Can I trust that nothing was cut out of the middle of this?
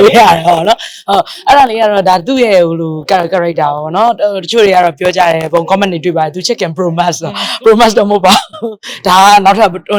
yes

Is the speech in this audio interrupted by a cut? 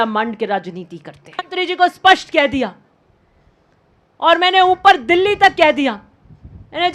yes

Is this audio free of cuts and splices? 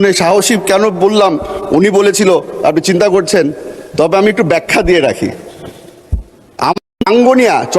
no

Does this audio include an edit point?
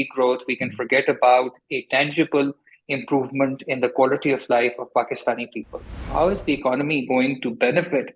yes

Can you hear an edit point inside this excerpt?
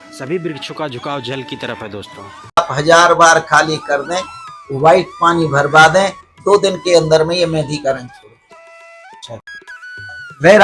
yes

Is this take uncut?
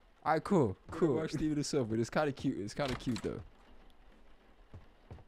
no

